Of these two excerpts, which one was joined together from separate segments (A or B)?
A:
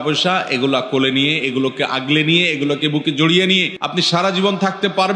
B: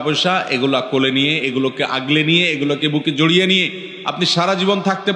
A